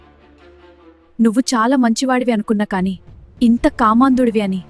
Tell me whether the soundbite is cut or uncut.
cut